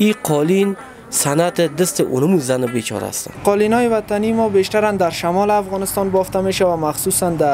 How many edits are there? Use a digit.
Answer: 1